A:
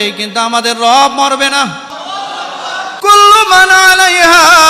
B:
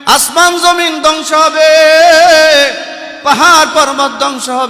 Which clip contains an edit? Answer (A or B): A